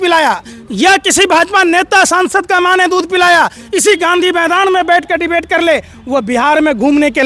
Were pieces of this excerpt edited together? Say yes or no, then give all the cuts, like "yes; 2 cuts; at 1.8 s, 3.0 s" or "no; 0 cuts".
no; 0 cuts